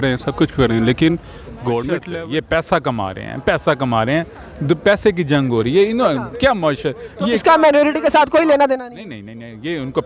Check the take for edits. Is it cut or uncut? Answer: cut